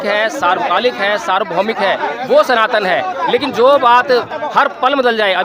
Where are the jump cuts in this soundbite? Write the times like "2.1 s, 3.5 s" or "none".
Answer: none